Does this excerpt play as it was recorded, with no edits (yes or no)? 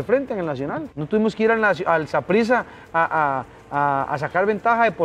no